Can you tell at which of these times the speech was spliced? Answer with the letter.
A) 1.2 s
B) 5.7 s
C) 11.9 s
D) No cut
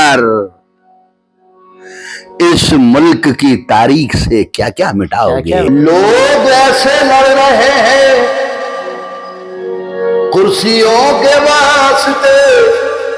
B